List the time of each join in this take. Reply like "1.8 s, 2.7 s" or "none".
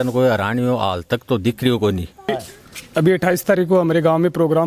2.1 s